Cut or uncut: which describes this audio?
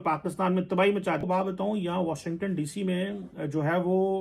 cut